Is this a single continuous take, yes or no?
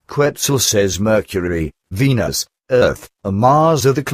no